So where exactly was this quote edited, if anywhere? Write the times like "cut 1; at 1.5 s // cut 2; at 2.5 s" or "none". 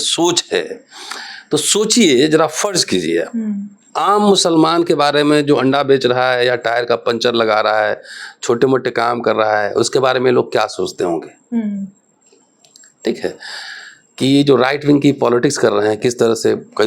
none